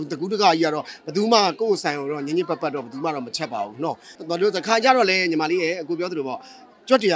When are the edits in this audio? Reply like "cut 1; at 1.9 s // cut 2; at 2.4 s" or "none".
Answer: cut 1; at 4.1 s